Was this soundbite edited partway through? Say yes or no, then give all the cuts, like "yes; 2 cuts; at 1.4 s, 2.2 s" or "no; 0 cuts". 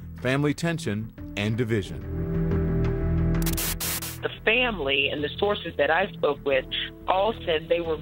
yes; 1 cut; at 5.1 s